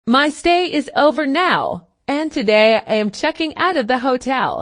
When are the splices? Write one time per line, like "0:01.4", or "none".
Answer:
0:01.9